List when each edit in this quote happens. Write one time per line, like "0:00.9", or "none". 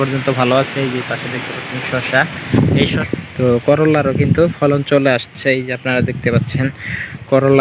0:03.0